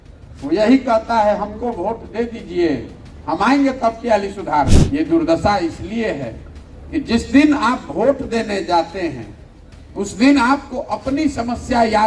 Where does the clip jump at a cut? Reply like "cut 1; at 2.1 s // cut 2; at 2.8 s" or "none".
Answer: cut 1; at 4.8 s